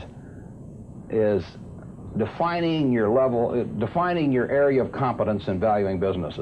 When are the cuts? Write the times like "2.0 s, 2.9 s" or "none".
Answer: none